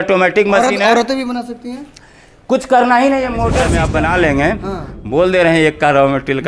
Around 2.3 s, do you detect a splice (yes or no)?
no